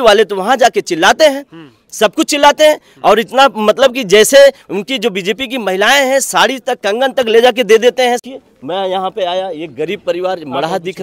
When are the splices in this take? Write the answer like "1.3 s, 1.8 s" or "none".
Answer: 8.2 s